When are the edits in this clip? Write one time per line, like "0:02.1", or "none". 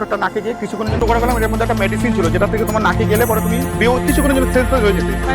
0:01.0